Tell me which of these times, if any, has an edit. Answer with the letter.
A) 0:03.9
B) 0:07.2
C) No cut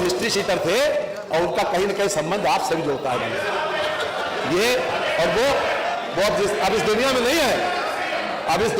C